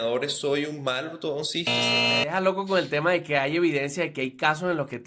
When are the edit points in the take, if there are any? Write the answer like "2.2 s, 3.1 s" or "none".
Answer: 1.8 s